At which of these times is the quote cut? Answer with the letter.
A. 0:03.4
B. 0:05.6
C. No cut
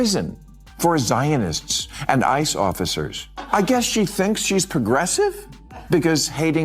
A